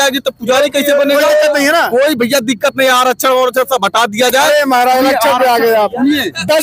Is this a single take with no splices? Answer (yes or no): yes